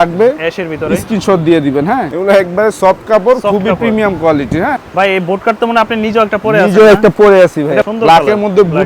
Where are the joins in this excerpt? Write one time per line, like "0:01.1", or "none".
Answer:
0:02.1
0:04.8
0:07.9